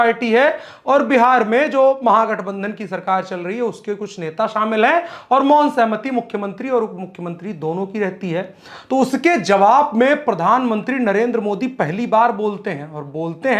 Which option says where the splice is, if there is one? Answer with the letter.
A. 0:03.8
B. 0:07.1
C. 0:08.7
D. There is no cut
D